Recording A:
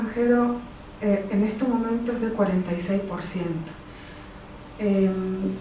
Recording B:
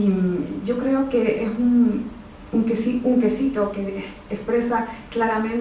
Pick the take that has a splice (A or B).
A